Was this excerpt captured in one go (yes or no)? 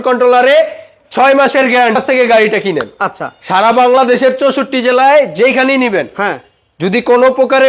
no